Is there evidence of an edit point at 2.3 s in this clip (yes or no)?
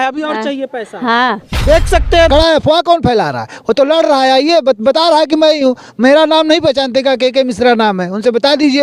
yes